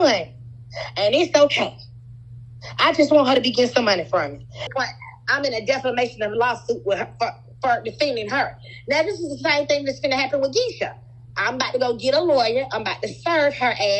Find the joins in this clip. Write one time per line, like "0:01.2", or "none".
0:04.7